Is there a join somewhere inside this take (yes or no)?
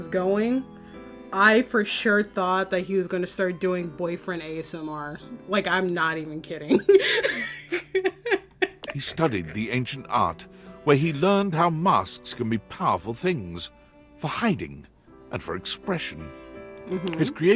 no